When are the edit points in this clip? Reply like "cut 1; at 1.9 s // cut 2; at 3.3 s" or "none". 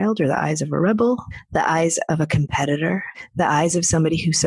cut 1; at 1.4 s // cut 2; at 3.2 s

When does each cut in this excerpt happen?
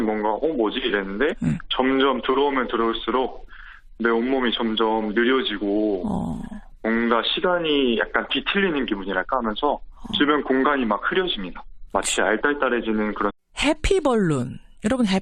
none

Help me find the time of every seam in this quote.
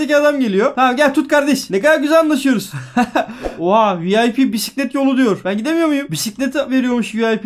cut 1; at 3.4 s // cut 2; at 6.1 s

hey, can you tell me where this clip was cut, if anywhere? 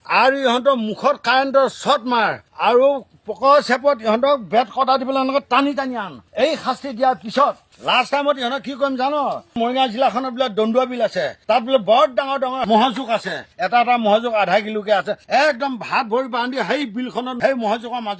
cut 1; at 7.7 s // cut 2; at 9.5 s

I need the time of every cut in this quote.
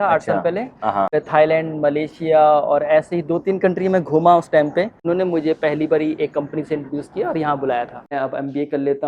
cut 1; at 1.1 s // cut 2; at 5.0 s // cut 3; at 8.1 s

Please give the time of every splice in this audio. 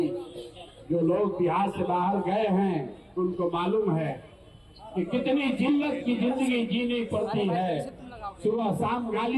none

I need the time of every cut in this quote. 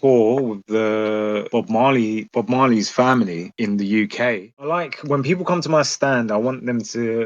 cut 1; at 4.5 s

